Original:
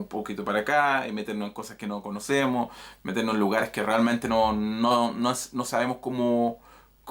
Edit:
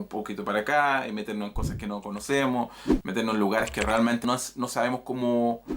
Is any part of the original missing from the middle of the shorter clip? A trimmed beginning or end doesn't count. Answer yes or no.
yes